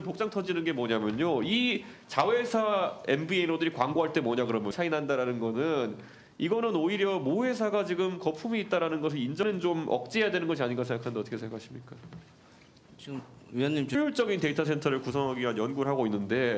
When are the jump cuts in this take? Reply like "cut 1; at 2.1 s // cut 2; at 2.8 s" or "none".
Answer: cut 1; at 4.7 s // cut 2; at 9.4 s // cut 3; at 14.0 s